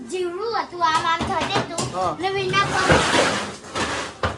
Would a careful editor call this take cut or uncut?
uncut